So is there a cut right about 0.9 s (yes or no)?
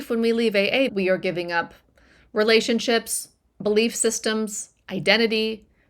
yes